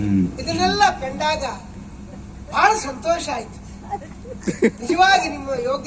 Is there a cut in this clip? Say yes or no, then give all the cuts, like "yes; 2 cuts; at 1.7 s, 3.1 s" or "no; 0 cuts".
no; 0 cuts